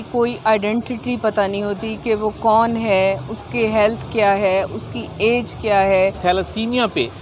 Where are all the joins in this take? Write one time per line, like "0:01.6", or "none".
0:06.2